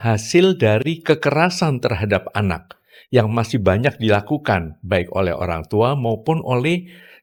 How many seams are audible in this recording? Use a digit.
0